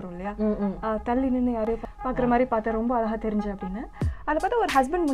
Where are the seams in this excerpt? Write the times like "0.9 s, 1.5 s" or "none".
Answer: 1.9 s